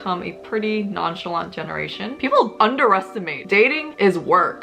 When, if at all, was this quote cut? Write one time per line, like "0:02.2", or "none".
0:02.1